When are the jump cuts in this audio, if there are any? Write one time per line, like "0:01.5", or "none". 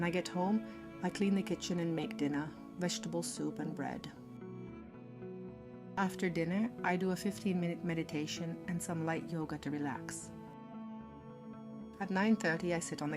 0:04.1
0:05.9
0:10.1
0:12.0